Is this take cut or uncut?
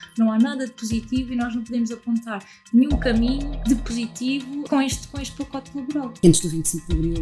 cut